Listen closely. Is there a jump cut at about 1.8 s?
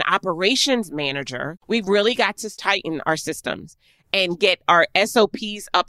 yes; 1 cut; at 1.8 s

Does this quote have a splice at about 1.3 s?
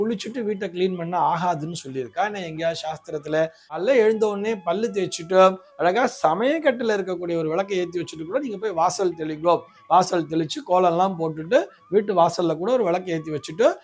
no; 1 cut; at 3.8 s

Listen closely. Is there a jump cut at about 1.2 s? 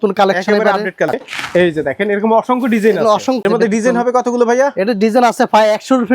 yes; 2 cuts; at 1.2 s, 3.4 s

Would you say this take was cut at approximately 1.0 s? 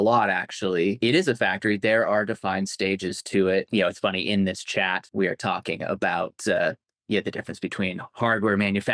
yes; 3 cuts; at 1.0 s, 3.7 s, 5.1 s

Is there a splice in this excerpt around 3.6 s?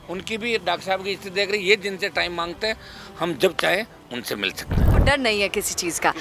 no; 1 cut; at 4.9 s

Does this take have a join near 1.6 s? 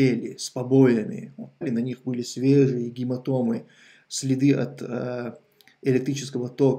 yes; 1 cut; at 1.6 s

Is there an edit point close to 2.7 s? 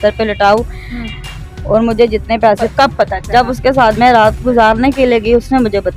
yes; 1 cut; at 2.7 s

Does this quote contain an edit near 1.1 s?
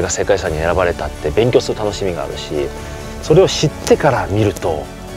no; 0 cuts

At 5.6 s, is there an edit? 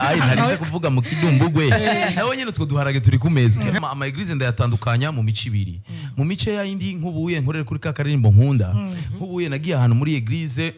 no; 1 cut; at 3.8 s

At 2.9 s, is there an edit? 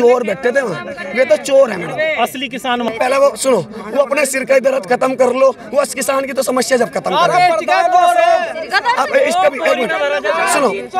yes; 1 cut; at 2.9 s

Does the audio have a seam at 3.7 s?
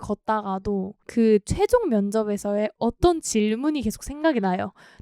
no; 1 cut; at 1.0 s

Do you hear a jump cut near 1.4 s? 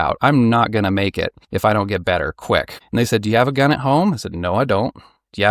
yes; 2 cuts; at 1.4 s, 2.8 s

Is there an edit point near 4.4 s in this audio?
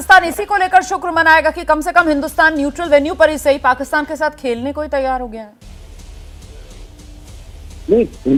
no; 0 cuts

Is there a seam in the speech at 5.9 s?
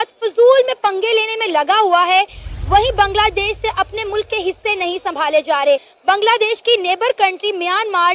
yes; 1 cut; at 5.9 s

